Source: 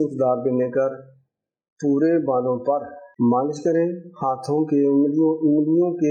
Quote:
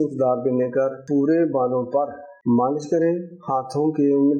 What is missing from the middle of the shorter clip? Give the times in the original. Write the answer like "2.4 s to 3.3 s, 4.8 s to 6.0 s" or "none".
1.0 s to 1.7 s